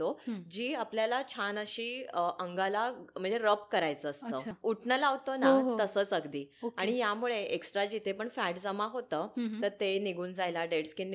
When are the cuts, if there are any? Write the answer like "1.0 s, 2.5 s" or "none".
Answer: 4.5 s